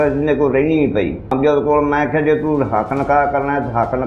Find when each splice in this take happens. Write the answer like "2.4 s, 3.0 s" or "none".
1.2 s